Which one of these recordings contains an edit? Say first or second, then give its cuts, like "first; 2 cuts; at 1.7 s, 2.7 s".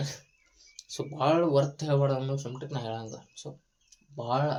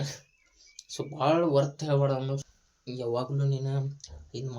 second; 1 cut; at 2.5 s